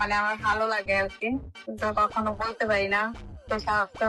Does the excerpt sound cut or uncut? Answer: uncut